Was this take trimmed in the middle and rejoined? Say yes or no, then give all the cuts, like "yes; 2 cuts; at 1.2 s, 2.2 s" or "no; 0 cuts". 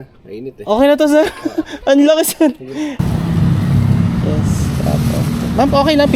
yes; 1 cut; at 2.9 s